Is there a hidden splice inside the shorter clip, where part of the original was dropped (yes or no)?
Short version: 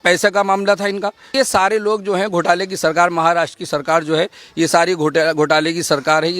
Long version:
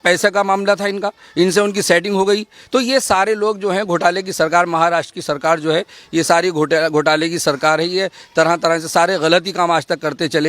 yes